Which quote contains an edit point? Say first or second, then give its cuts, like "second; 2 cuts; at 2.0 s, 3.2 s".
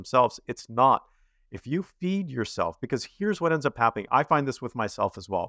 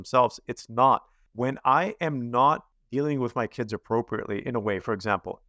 second; 2 cuts; at 1.2 s, 2.8 s